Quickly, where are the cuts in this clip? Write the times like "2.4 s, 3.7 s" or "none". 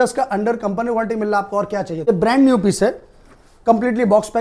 2.1 s